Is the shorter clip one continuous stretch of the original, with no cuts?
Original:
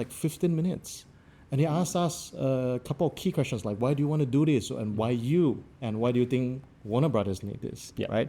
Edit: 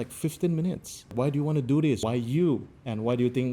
no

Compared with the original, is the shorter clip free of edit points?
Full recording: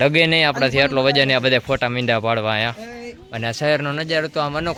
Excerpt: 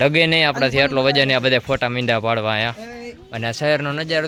yes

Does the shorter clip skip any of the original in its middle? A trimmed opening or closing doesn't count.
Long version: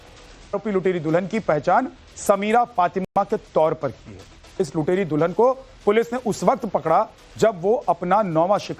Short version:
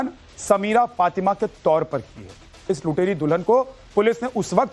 yes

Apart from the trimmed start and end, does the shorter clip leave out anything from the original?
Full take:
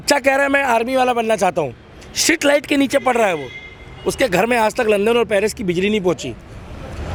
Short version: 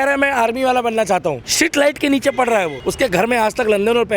yes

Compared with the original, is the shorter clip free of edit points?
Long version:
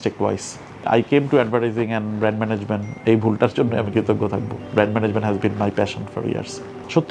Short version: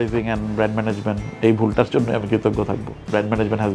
yes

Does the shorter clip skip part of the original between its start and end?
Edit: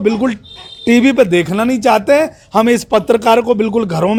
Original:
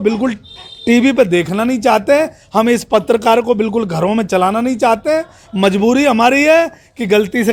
no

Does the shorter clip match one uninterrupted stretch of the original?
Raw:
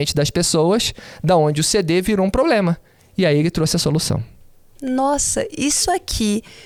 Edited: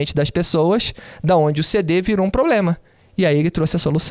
yes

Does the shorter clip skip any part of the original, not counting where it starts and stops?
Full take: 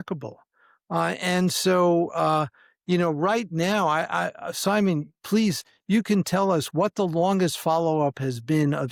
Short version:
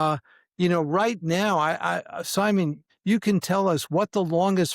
yes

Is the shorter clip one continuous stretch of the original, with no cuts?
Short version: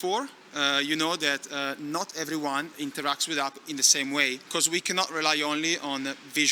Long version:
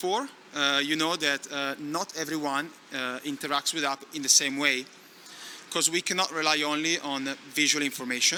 no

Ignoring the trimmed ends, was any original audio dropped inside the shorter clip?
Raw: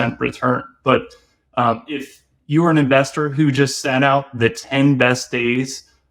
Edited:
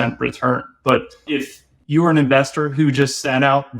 yes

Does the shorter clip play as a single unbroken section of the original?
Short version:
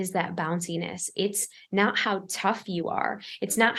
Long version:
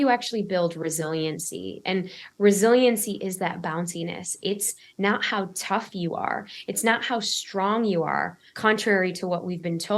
yes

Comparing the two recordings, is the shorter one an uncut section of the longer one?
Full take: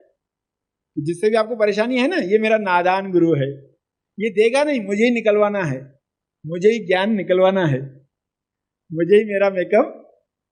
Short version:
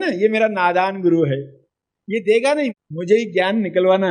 no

